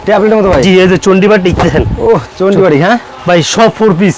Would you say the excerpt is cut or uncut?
uncut